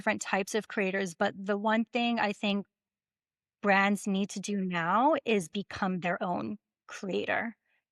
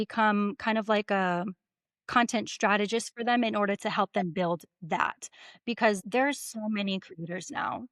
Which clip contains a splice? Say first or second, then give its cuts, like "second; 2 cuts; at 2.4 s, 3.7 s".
second; 1 cut; at 6.0 s